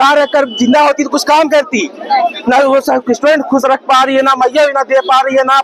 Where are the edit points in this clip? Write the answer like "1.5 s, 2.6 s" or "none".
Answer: none